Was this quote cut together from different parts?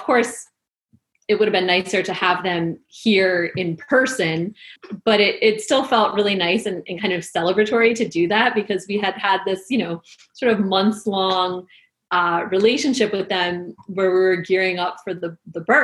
no; 0 cuts

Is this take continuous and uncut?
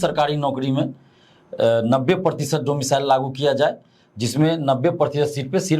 yes; 0 cuts

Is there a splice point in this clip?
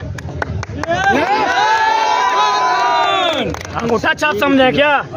no; 0 cuts

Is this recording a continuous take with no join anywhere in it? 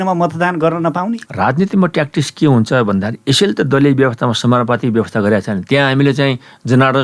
yes; 0 cuts

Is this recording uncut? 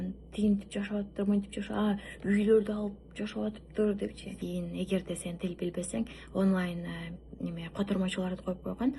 no; 1 cut; at 4.4 s

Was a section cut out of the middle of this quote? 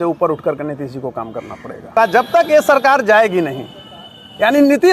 yes; 1 cut; at 1.9 s

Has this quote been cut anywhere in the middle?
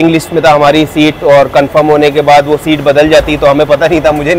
no; 0 cuts

